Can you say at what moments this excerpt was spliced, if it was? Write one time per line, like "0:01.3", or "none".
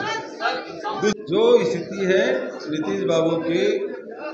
0:01.1